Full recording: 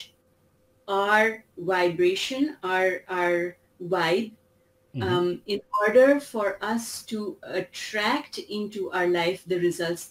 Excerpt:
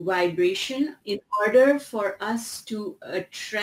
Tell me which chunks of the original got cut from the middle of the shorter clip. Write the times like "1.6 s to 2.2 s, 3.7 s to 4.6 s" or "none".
2.6 s to 5.4 s